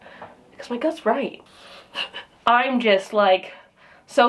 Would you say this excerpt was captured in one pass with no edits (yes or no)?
no